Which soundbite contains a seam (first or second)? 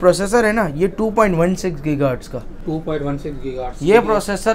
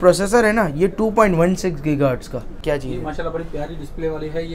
second